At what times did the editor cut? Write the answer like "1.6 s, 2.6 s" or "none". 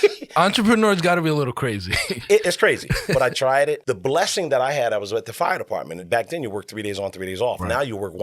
3.9 s, 6.0 s